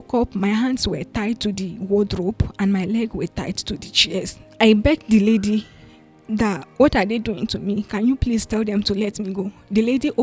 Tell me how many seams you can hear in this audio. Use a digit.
1